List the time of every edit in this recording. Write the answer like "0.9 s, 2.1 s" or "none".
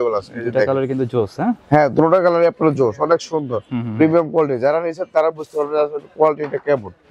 none